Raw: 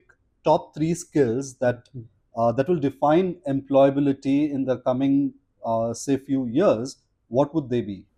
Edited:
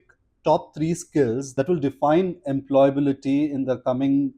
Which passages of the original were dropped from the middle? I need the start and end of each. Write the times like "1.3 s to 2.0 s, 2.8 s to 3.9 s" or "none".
1.5 s to 2.5 s